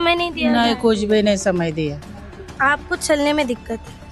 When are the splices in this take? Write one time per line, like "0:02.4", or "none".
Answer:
none